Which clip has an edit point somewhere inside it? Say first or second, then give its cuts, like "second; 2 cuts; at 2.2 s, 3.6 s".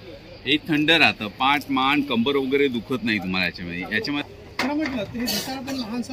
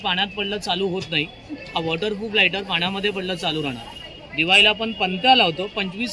first; 1 cut; at 4.2 s